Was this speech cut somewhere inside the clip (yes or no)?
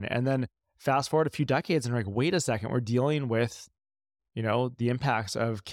no